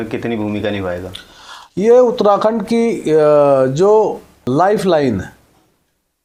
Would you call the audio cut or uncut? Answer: uncut